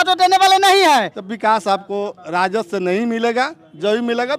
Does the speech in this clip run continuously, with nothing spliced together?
no; 1 cut; at 1.1 s

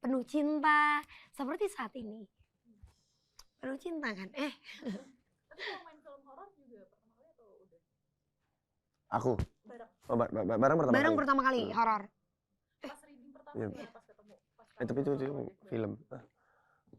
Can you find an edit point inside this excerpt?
no; 0 cuts

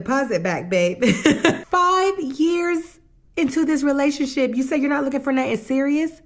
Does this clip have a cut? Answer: yes; 1 cut; at 1.6 s

